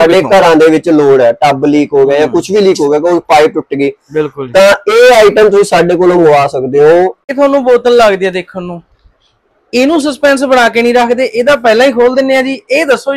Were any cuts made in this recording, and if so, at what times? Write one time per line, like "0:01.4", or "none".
0:07.2